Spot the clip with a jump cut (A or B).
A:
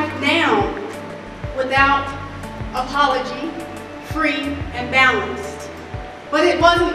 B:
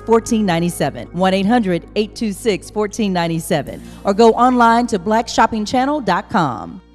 B